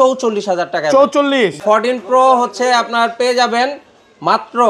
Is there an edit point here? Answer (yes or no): yes